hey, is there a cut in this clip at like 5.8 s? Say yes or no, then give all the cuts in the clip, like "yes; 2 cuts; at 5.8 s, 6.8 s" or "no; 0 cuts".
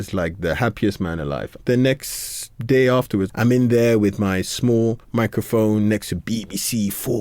no; 2 cuts; at 1.5 s, 3.3 s